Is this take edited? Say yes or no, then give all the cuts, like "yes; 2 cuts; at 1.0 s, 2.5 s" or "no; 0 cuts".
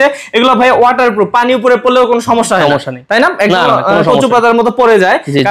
no; 0 cuts